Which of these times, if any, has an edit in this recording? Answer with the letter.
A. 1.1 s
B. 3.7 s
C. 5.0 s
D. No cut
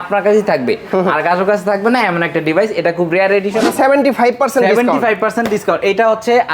B